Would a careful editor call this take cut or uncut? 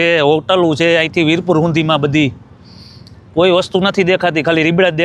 uncut